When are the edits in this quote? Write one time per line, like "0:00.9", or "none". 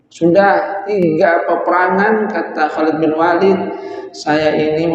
0:01.0